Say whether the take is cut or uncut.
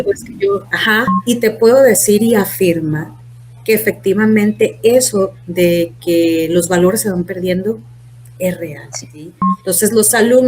cut